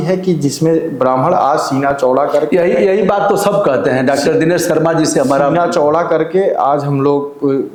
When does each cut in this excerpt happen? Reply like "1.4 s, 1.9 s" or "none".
none